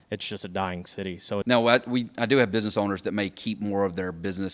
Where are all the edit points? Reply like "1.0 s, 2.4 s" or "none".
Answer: 1.4 s